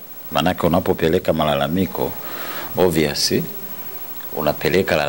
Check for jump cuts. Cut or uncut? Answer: uncut